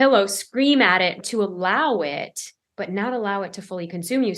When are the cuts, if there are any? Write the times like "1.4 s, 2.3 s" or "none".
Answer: 1.2 s